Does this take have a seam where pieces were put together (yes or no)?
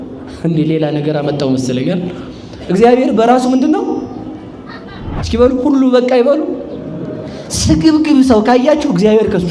yes